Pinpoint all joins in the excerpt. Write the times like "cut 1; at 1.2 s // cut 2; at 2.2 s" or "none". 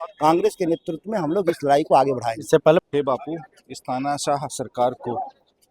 cut 1; at 2.8 s